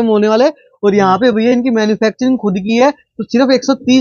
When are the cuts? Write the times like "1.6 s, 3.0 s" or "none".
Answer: none